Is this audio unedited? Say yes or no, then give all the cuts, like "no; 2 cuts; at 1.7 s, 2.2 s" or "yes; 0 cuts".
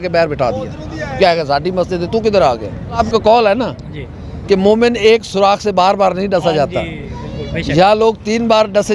no; 1 cut; at 3.0 s